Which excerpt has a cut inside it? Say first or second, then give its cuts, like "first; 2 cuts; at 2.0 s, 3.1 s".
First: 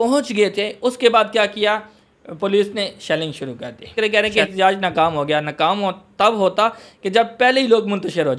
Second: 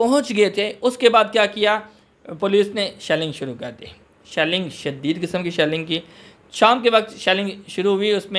first; 1 cut; at 3.9 s